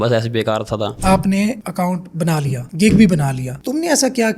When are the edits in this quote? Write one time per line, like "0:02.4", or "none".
0:00.9
0:01.6
0:02.6
0:03.5